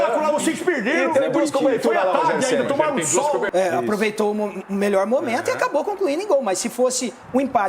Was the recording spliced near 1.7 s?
no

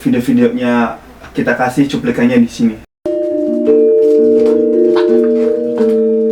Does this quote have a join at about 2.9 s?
yes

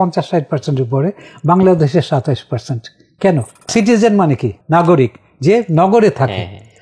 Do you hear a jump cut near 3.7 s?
yes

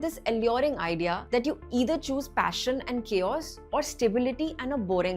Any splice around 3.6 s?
no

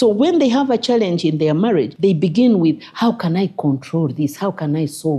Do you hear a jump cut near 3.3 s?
no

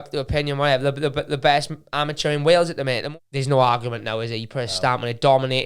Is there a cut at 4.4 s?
no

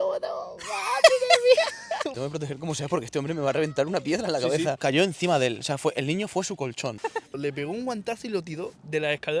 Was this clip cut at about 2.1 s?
yes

